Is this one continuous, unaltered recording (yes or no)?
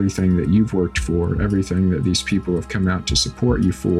yes